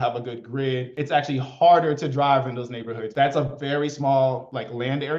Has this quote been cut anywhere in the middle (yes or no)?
yes